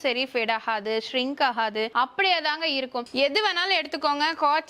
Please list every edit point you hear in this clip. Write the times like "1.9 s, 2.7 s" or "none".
1.9 s, 3.1 s